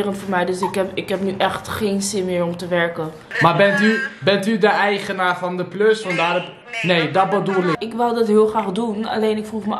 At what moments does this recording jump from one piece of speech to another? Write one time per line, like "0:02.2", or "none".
0:03.3
0:07.8